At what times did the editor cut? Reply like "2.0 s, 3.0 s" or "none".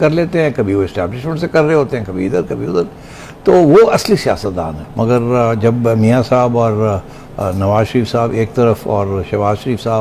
4.8 s